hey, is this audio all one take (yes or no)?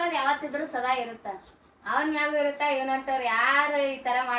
yes